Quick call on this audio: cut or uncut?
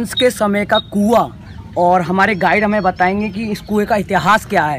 uncut